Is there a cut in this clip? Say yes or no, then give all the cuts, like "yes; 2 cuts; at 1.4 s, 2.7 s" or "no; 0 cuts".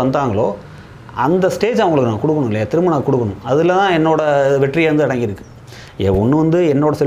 no; 0 cuts